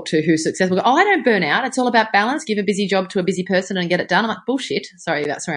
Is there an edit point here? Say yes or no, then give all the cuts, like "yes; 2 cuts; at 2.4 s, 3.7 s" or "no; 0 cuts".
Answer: no; 0 cuts